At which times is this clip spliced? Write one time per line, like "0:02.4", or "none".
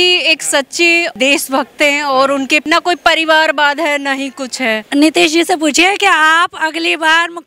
0:01.1
0:02.6
0:04.8